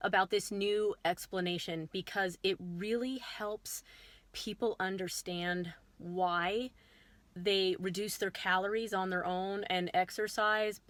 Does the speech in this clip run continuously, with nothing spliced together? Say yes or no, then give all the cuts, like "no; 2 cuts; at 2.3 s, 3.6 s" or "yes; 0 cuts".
yes; 0 cuts